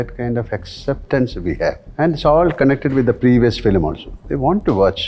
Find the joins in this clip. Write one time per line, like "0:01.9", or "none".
0:01.9